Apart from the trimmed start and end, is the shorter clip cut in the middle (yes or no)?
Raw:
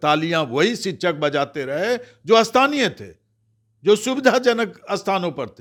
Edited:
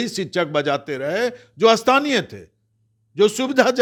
no